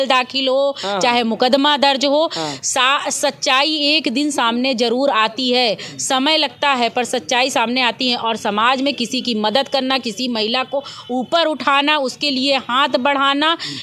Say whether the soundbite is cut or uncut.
uncut